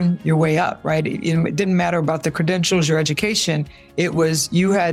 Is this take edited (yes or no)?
no